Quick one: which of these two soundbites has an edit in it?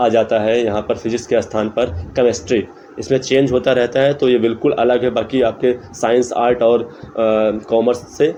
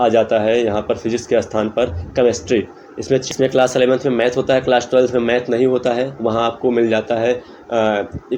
second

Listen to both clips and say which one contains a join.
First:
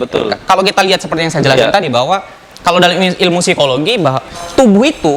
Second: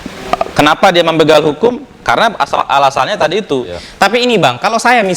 second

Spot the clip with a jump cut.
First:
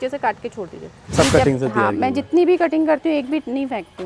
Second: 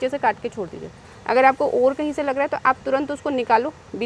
first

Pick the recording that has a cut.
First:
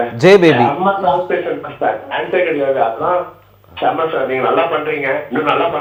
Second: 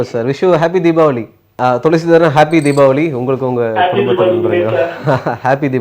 second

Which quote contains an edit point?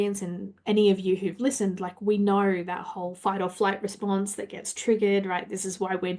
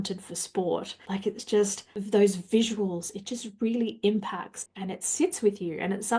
second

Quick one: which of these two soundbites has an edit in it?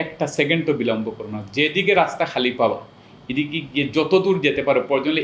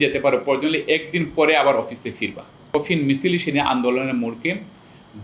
second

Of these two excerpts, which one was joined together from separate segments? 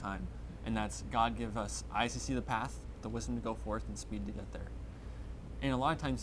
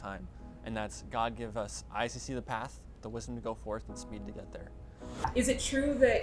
second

